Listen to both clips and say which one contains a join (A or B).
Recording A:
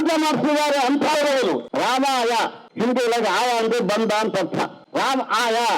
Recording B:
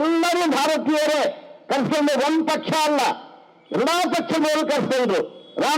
A